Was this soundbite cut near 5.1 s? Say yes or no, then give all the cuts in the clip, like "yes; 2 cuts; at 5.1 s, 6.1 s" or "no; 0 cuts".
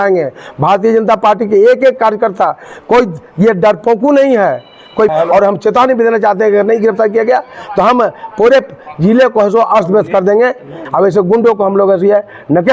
yes; 2 cuts; at 5.1 s, 10.8 s